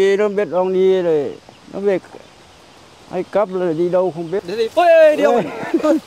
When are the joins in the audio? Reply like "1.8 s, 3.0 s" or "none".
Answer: 4.4 s